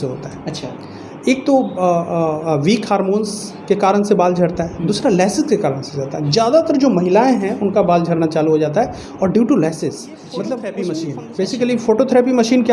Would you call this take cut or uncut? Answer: cut